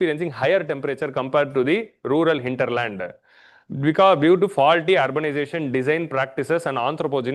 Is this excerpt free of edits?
yes; 0 cuts

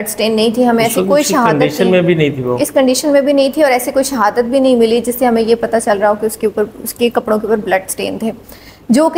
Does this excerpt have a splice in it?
no; 0 cuts

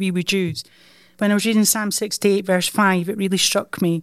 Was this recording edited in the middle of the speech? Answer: yes; 1 cut; at 1.1 s

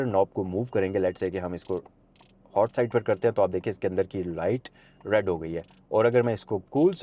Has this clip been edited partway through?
no; 0 cuts

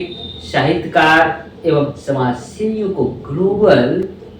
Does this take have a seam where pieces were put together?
no; 0 cuts

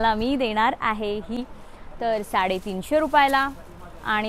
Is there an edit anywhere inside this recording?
yes; 1 cut; at 1.4 s

